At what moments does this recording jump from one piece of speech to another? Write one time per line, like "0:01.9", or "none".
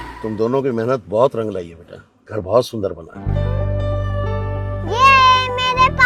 none

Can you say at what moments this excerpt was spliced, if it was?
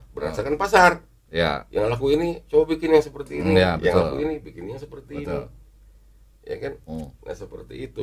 none

